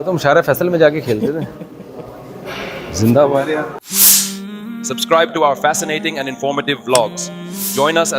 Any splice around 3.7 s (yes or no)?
yes